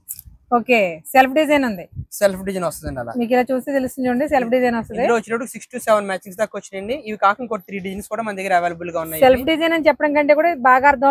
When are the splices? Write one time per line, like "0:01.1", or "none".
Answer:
none